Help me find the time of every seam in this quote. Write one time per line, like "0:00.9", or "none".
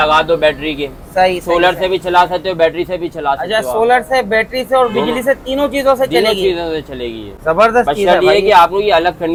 none